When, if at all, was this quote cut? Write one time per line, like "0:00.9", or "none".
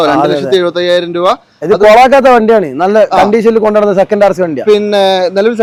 none